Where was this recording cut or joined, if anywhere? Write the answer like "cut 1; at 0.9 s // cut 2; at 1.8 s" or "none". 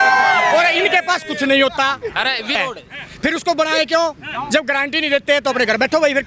cut 1; at 2.6 s

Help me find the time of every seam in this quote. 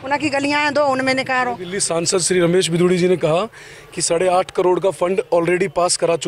cut 1; at 1.7 s

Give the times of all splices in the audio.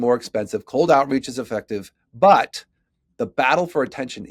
none

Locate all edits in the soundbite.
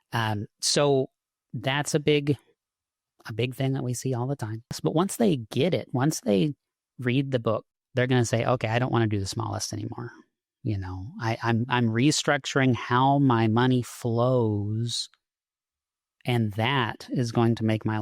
cut 1; at 4.8 s // cut 2; at 7.8 s

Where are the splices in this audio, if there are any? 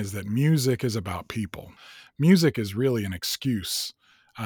cut 1; at 1.7 s

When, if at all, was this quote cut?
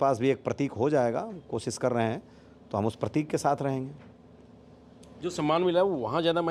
none

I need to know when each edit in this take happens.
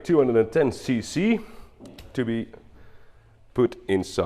none

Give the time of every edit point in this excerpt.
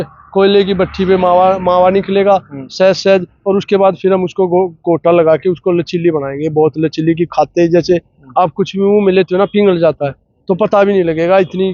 none

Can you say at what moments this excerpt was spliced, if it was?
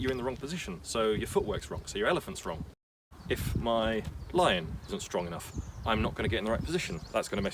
cut 1; at 2.9 s

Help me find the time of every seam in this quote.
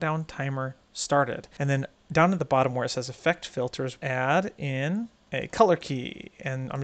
cut 1; at 1.5 s // cut 2; at 4.0 s // cut 3; at 5.2 s

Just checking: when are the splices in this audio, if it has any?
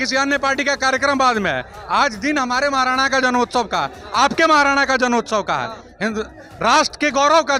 none

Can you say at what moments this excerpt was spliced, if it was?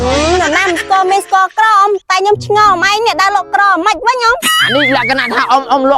cut 1; at 4.4 s

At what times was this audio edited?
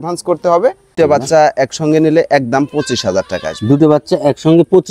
cut 1; at 0.9 s

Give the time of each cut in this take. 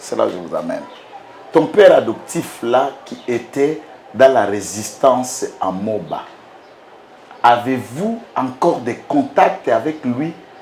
none

